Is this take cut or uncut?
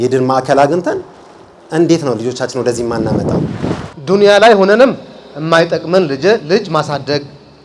cut